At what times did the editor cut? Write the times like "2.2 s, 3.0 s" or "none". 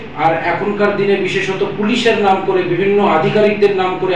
none